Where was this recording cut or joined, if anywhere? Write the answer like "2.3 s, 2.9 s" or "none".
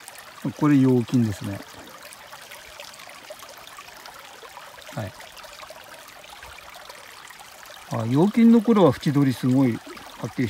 none